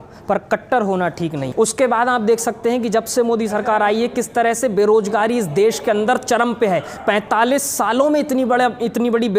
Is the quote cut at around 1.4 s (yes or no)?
yes